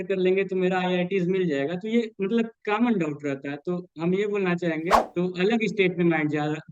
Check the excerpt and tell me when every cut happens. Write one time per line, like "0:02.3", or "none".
0:05.0